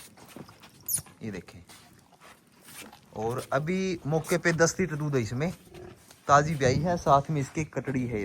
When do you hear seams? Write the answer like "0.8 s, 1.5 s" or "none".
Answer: none

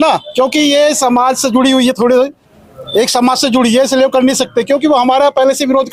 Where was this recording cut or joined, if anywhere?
none

